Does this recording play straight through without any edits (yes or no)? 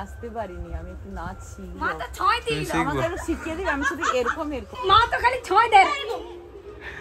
yes